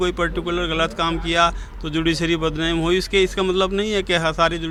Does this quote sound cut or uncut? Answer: uncut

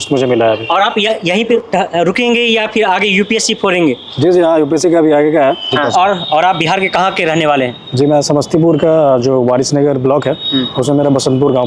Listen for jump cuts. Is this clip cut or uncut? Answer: uncut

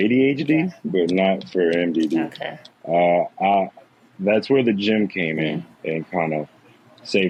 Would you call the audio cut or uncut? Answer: uncut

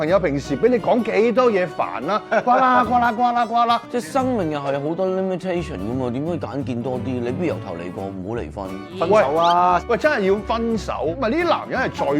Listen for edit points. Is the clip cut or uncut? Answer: cut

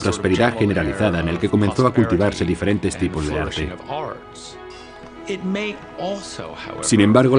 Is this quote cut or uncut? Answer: cut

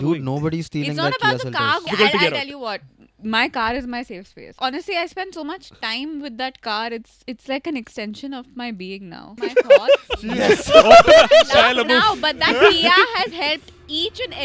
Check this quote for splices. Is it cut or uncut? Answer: cut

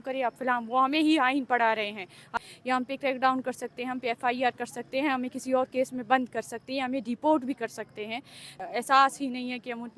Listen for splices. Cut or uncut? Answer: cut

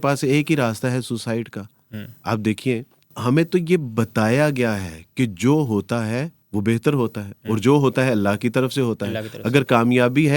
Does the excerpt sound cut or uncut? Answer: uncut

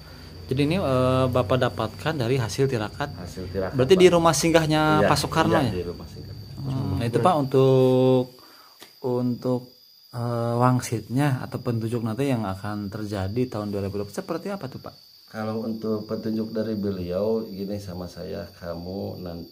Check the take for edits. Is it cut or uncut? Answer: cut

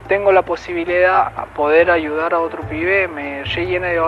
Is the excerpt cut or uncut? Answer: cut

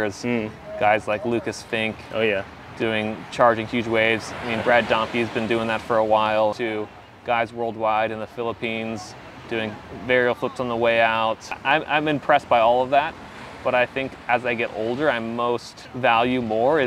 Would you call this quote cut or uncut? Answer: cut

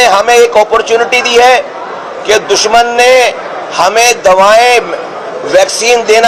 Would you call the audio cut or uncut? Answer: uncut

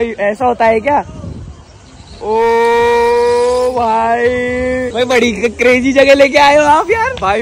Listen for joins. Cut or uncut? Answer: uncut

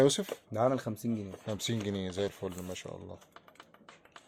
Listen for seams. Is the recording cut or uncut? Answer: uncut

